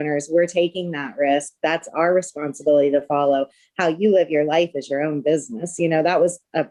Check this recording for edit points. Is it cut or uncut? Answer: uncut